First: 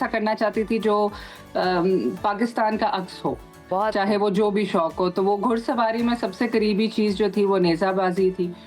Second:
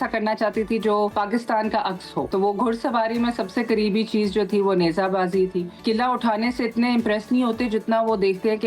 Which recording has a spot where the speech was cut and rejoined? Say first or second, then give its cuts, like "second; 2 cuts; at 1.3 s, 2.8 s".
second; 3 cuts; at 1.1 s, 2.3 s, 5.7 s